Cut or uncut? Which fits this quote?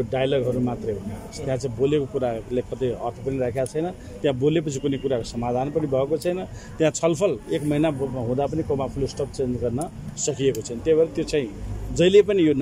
uncut